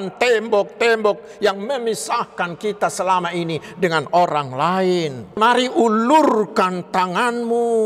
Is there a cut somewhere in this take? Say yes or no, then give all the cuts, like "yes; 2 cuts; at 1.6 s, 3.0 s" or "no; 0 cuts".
yes; 1 cut; at 5.4 s